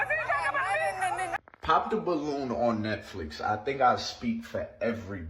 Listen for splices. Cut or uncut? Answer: cut